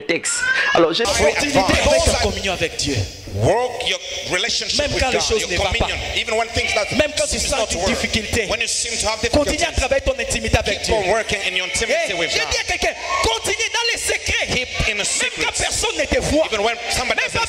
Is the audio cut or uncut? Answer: cut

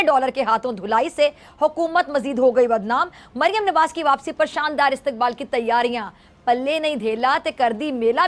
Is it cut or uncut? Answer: uncut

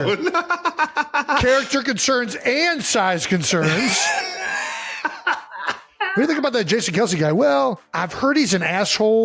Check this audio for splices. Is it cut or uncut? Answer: cut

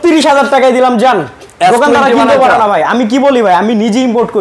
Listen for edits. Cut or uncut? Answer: uncut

